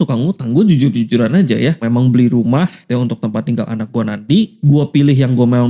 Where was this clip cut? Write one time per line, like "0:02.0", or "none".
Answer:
0:01.8
0:02.8
0:04.6